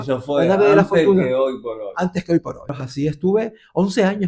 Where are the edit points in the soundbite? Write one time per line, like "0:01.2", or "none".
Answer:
0:02.8